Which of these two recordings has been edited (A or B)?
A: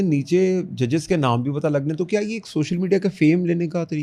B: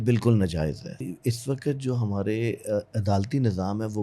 B